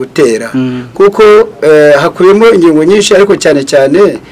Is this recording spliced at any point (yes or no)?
no